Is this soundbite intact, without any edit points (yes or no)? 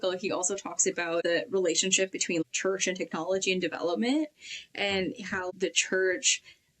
no